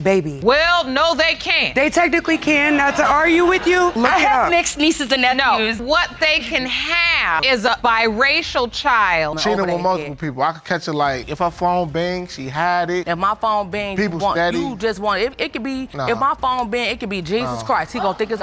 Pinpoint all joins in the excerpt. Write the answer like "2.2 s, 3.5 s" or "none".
9.3 s